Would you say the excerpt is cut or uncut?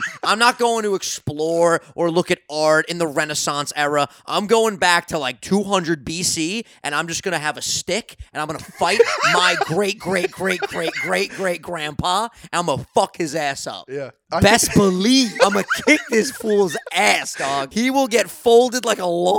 cut